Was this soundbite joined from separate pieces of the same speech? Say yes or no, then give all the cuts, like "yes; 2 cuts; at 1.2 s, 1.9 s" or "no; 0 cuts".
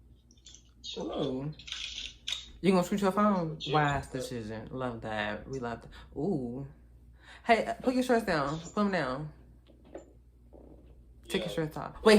no; 0 cuts